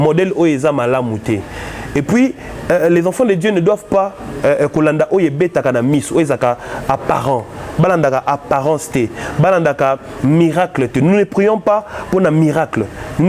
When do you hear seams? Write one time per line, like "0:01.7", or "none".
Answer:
none